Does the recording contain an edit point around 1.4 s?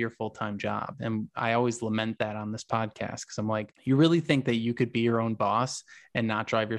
no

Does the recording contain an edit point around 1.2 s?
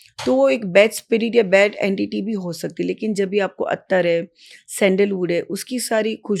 no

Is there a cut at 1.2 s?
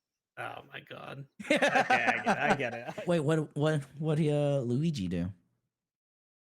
no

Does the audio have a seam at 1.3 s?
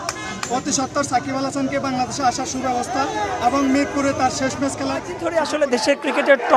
no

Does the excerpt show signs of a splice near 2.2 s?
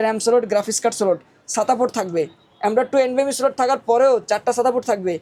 no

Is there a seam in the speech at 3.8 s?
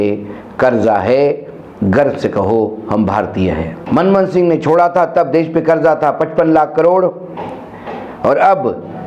yes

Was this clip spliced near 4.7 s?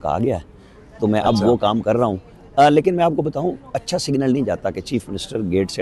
no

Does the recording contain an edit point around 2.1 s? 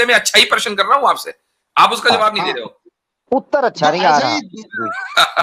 no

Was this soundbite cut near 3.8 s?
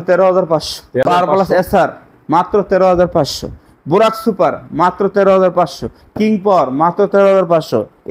no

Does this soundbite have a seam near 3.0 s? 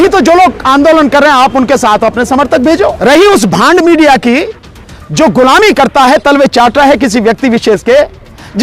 yes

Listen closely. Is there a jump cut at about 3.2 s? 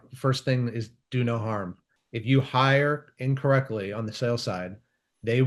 no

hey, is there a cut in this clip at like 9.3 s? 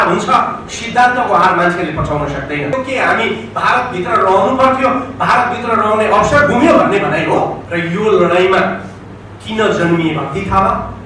no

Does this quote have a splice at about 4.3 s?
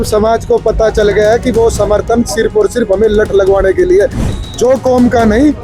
yes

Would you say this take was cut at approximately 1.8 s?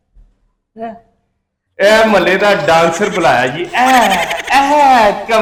no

